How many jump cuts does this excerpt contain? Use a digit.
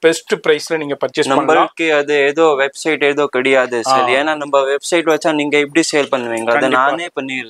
0